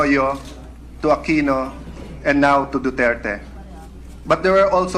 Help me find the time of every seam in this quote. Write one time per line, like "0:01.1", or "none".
0:03.8